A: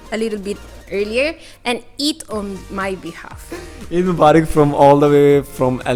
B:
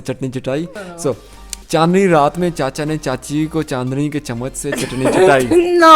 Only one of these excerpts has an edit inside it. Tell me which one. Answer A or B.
B